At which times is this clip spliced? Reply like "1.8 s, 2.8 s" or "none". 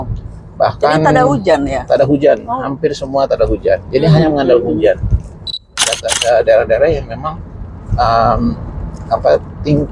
5.6 s